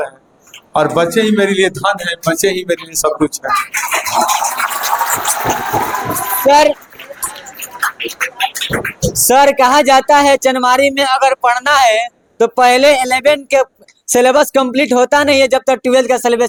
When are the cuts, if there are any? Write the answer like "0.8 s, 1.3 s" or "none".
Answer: none